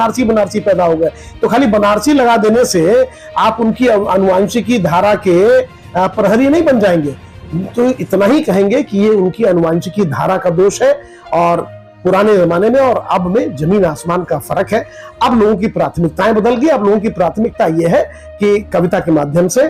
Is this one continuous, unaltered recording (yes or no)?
yes